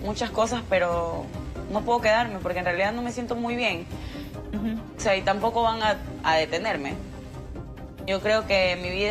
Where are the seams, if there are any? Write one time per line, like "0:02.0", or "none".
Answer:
none